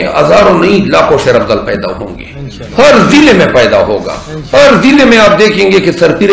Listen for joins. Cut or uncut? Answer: uncut